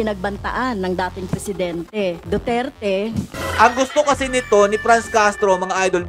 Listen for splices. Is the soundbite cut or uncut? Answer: cut